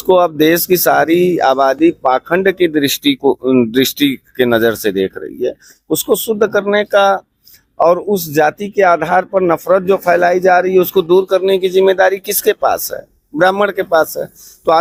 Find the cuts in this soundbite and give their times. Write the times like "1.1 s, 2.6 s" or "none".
none